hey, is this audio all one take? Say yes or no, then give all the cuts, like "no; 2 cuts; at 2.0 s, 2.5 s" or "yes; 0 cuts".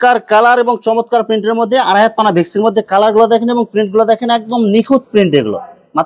yes; 0 cuts